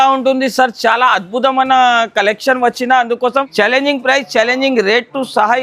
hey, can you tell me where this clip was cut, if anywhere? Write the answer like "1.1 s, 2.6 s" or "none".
3.5 s